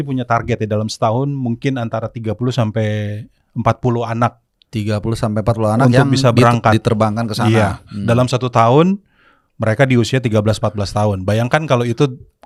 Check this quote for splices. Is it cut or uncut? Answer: uncut